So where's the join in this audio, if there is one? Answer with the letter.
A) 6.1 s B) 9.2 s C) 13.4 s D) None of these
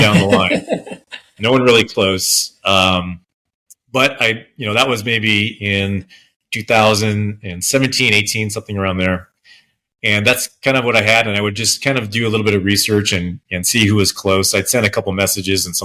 D